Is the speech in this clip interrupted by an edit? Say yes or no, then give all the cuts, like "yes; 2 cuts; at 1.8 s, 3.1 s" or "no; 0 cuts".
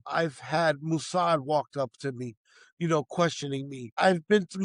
no; 0 cuts